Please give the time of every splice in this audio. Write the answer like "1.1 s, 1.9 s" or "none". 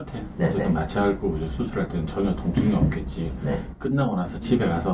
none